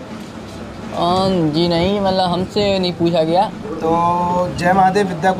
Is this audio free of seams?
no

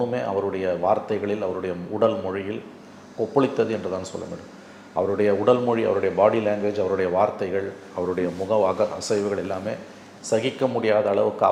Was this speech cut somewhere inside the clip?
no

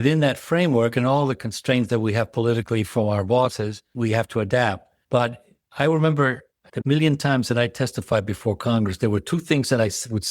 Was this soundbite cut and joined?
yes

